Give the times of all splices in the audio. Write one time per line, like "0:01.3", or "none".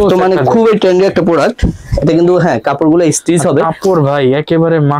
none